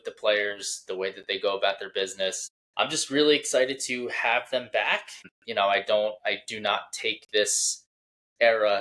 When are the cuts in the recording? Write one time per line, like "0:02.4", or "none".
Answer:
0:02.4
0:05.3